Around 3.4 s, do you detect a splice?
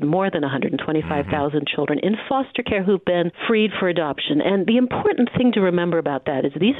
yes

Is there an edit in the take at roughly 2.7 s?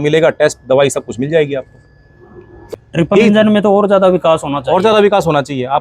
yes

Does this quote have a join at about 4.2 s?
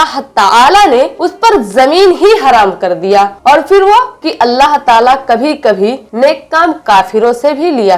yes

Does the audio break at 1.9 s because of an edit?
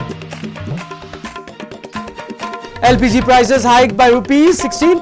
yes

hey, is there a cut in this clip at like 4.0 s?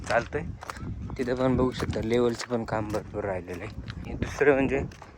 yes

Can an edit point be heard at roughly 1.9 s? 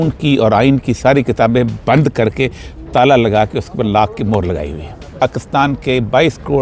no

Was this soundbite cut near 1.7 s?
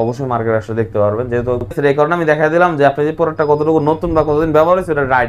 yes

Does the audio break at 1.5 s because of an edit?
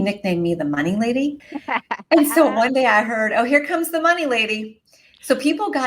yes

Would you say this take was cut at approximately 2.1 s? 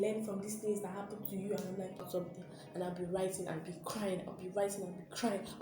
yes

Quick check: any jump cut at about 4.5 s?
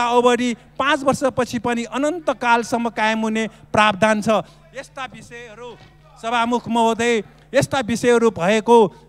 no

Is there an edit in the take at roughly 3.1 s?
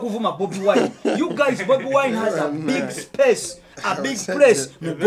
no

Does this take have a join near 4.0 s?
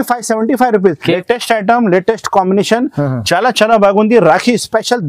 no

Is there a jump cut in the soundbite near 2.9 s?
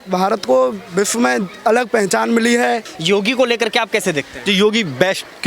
yes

